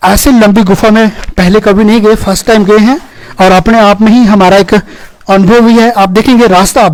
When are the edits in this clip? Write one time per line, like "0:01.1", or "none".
none